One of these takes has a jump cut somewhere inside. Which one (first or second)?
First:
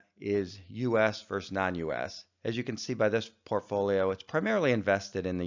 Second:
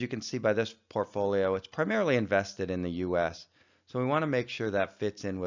second